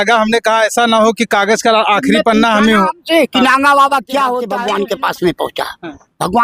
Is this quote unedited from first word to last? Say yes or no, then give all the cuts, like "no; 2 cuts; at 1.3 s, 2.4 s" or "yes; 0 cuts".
no; 1 cut; at 4.5 s